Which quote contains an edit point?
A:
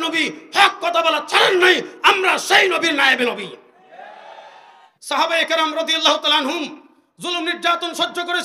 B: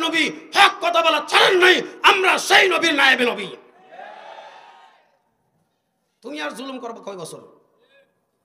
A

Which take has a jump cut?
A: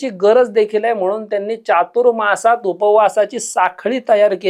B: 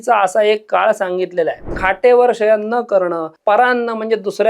B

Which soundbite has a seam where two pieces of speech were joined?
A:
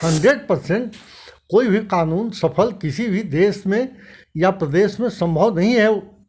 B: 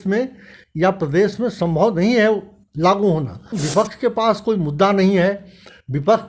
B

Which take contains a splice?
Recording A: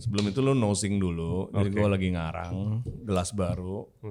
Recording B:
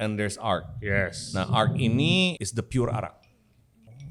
B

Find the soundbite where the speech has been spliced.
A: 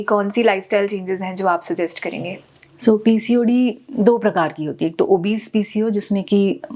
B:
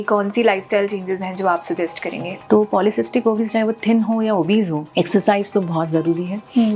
B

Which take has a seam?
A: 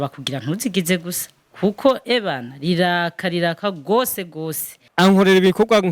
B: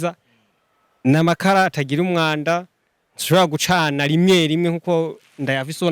A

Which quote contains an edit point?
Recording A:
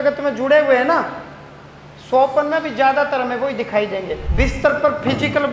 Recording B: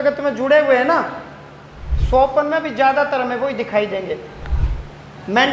A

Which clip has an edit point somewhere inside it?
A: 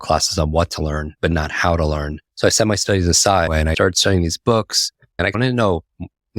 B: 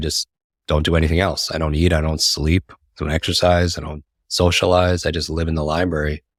A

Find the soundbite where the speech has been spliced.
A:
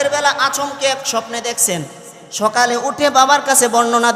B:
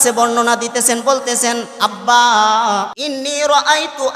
B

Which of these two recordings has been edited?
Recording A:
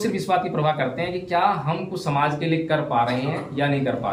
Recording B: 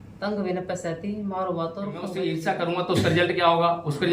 B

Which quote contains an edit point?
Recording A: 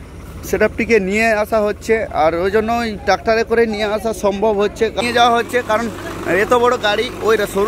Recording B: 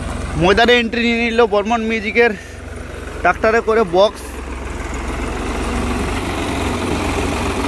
A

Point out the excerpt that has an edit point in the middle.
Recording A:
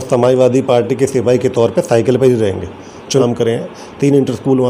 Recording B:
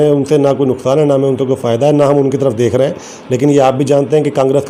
A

